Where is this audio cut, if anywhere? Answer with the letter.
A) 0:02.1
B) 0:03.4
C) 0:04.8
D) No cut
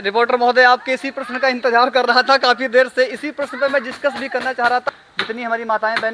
C